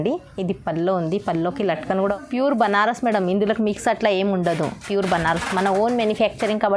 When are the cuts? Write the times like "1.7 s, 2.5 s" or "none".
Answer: 2.2 s